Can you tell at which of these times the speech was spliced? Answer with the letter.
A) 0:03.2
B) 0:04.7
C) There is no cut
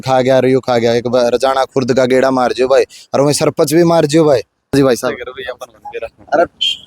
B